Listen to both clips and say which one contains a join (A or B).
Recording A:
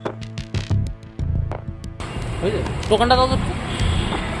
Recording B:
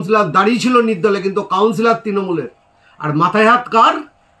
A